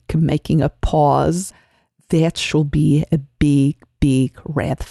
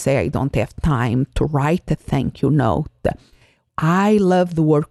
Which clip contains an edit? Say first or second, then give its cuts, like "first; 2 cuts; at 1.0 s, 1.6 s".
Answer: second; 1 cut; at 3.6 s